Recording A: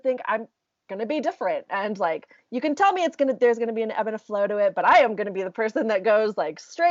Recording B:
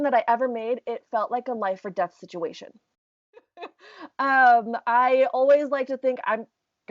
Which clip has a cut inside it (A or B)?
B